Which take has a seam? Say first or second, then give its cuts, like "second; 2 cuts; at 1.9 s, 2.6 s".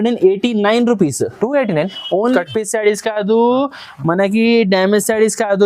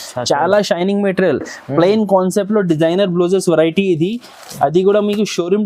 first; 1 cut; at 2.4 s